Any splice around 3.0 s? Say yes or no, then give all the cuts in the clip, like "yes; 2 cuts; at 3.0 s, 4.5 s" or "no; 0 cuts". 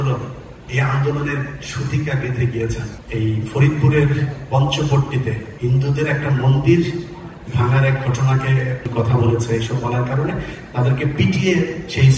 yes; 3 cuts; at 3.0 s, 5.5 s, 8.8 s